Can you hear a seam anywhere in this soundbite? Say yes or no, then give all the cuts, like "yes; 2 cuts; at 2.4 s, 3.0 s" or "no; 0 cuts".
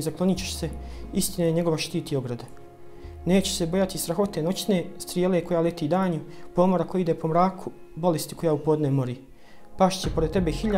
yes; 1 cut; at 2.7 s